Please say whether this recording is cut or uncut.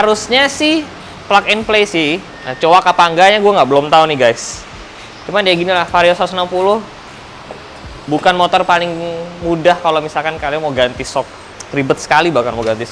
uncut